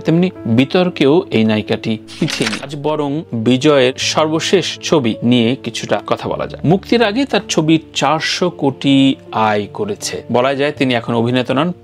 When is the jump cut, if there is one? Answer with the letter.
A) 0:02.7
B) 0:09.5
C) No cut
A